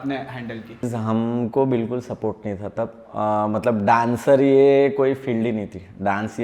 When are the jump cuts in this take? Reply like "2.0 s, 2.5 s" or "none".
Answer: 0.9 s